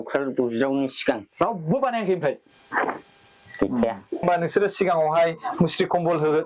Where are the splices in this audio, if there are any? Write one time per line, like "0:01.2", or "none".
0:04.2

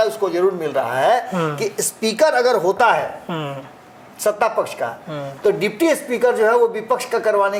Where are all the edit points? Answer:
none

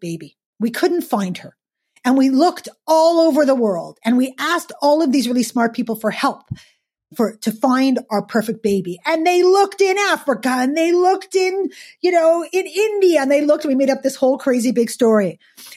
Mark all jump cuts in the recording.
none

